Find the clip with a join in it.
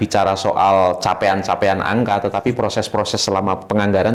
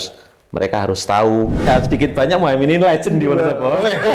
second; 1 cut; at 1.7 s

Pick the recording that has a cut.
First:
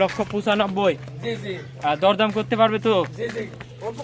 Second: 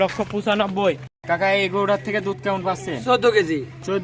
second; 1 cut; at 1.2 s

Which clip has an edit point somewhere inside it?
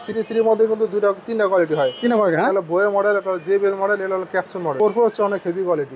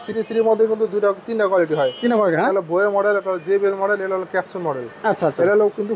first; 1 cut; at 4.7 s

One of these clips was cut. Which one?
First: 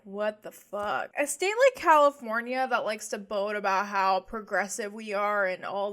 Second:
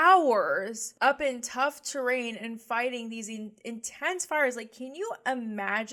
first; 1 cut; at 1.1 s

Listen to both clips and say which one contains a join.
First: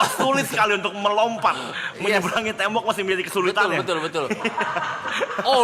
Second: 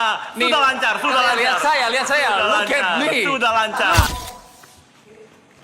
second; 1 cut; at 4.1 s

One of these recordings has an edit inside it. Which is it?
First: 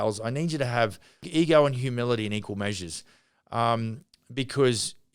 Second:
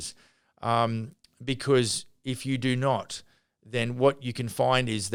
first; 1 cut; at 1.3 s

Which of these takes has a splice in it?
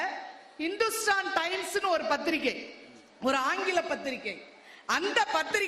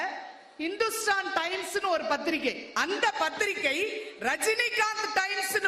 second; 1 cut; at 2.7 s

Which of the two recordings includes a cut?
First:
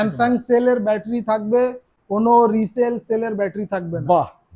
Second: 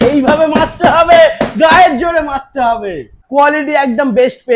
second; 1 cut; at 3.2 s

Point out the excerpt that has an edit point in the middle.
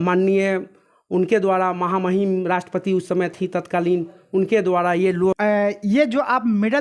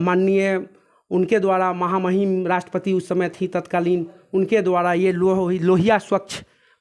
first; 1 cut; at 5.4 s

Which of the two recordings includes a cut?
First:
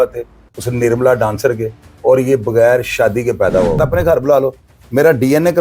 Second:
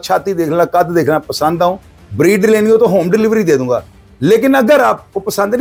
first; 1 cut; at 3.8 s

